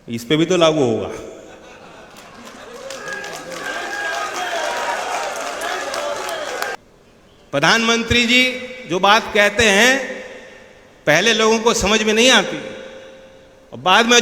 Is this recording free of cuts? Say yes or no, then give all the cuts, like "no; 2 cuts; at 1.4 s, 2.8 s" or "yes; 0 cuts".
no; 1 cut; at 6.8 s